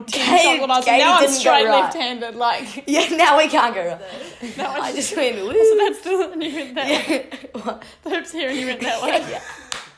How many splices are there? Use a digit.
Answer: 1